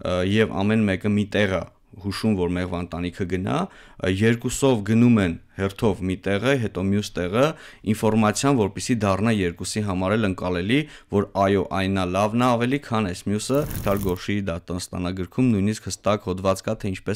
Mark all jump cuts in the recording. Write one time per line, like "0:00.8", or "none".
0:13.8